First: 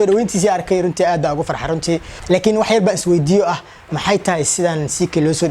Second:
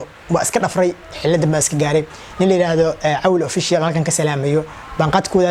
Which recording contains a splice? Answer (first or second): first